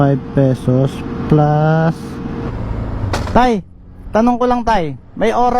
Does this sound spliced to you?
yes; 1 cut; at 2.4 s

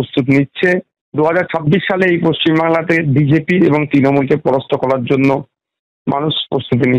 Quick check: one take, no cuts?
yes; 0 cuts

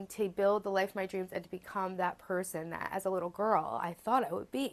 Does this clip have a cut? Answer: no; 0 cuts

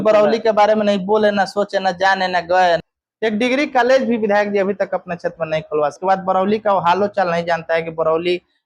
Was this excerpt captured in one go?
no; 2 cuts; at 2.8 s, 6.0 s

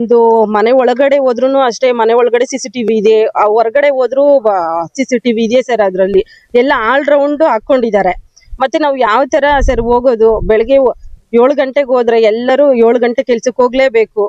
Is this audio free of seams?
yes; 0 cuts

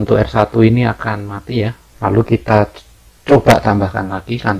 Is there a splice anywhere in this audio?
yes; 1 cut; at 1.8 s

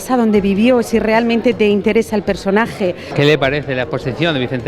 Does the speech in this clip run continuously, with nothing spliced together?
no; 1 cut; at 3.1 s

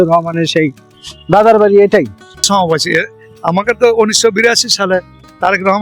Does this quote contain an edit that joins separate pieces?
yes; 1 cut; at 2.4 s

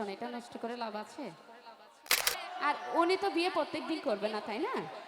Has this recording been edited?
yes; 1 cut; at 2.1 s

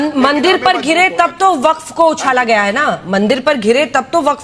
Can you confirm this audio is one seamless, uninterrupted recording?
yes; 0 cuts

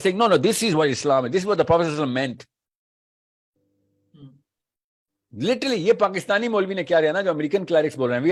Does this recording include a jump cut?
no; 0 cuts

